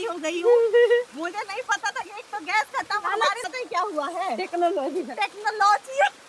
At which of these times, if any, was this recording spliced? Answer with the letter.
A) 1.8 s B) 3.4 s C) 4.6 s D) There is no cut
B